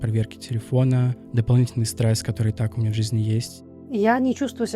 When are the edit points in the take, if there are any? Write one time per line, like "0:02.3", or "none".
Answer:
0:03.9